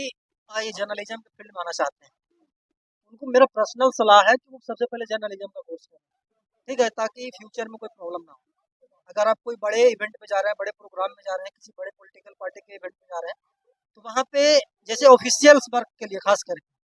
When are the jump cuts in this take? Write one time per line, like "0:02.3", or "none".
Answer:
none